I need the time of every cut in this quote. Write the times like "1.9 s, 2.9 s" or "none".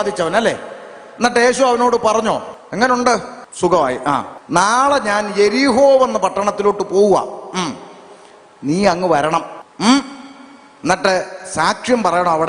2.6 s, 3.4 s, 4.4 s, 9.6 s